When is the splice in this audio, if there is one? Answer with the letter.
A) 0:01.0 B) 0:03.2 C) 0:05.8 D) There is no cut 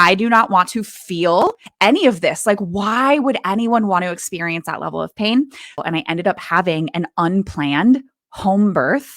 C